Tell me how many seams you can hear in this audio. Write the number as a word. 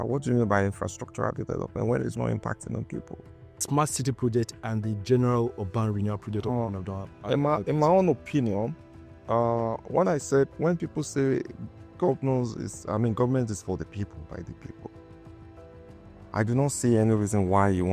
one